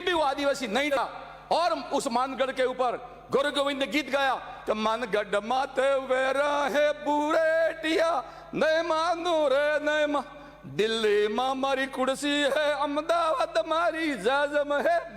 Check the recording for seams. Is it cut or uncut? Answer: cut